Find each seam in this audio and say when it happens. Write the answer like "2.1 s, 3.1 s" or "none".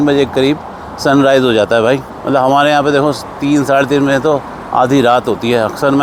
none